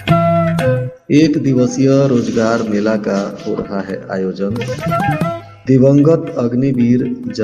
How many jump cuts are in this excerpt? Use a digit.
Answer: 1